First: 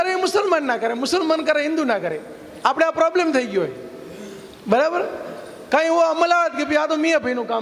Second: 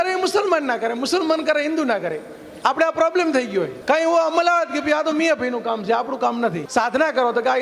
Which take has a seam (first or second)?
second